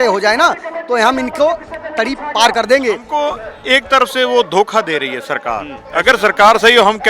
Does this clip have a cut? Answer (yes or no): yes